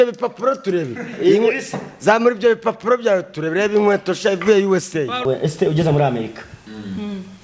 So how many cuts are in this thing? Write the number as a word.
one